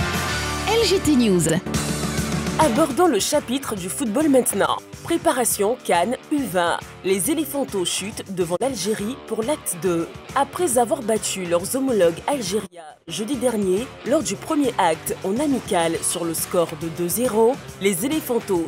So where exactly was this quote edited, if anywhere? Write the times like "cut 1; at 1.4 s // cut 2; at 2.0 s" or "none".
cut 1; at 1.5 s